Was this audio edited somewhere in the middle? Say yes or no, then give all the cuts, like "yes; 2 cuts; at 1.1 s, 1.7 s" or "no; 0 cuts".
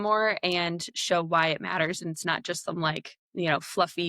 yes; 1 cut; at 3.1 s